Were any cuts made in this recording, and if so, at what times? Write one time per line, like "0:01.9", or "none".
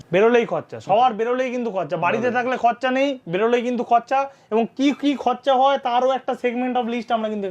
none